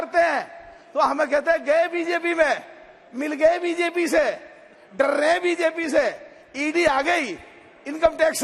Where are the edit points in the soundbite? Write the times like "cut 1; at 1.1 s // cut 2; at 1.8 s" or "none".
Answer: none